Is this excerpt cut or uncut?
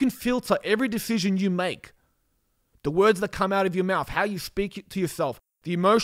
uncut